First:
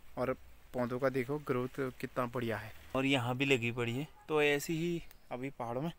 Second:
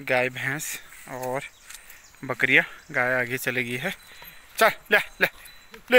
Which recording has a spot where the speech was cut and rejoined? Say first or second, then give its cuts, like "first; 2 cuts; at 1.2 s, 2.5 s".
first; 1 cut; at 2.9 s